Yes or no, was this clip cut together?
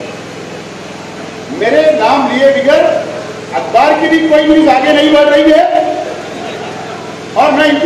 no